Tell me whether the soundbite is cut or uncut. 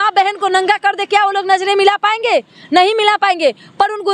uncut